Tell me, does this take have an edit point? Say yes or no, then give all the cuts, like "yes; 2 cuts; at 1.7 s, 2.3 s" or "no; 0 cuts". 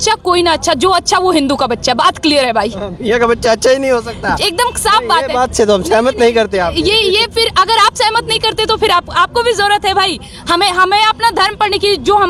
no; 0 cuts